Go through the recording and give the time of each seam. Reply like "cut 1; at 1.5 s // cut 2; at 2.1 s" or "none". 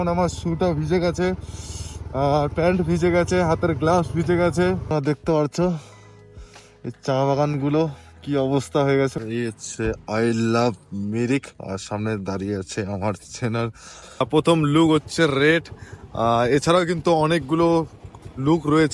cut 1; at 4.9 s // cut 2; at 9.2 s // cut 3; at 14.2 s